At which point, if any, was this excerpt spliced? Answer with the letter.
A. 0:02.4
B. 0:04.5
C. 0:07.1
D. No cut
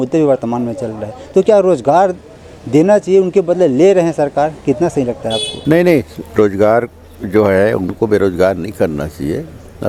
D